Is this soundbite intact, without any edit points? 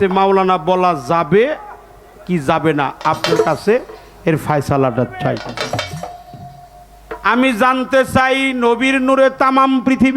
no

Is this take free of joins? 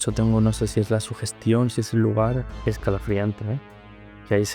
no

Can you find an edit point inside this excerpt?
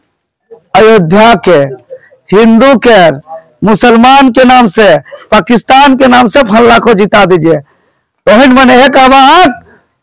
no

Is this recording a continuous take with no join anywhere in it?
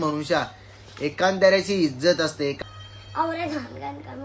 no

